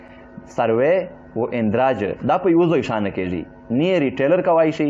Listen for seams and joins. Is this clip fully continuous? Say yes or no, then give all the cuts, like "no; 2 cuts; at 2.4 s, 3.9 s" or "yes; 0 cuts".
yes; 0 cuts